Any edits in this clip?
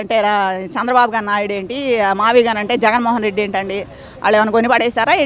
no; 0 cuts

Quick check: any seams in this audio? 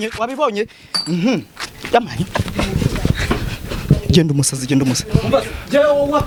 no; 0 cuts

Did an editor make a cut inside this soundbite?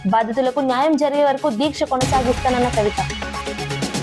no; 0 cuts

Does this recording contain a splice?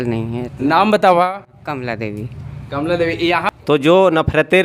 yes; 1 cut; at 3.5 s

